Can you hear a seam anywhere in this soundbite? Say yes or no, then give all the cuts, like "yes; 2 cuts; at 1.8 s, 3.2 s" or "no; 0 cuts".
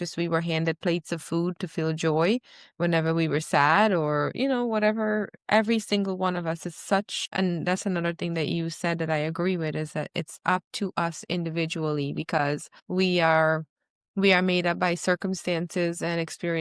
yes; 2 cuts; at 7.2 s, 12.7 s